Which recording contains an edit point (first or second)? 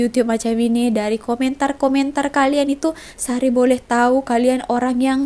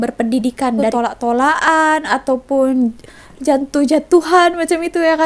second